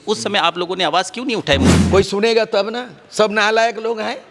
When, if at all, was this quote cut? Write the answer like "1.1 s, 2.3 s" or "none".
1.7 s